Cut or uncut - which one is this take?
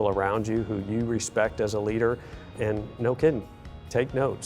cut